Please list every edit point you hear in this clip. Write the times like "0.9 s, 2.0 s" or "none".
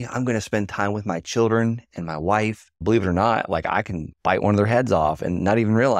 2.7 s